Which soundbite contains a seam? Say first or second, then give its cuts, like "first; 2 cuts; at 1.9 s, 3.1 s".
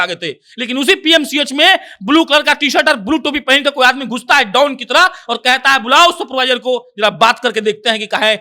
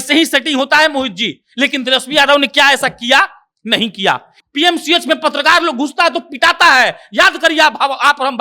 second; 1 cut; at 4.3 s